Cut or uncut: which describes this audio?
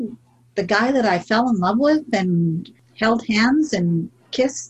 cut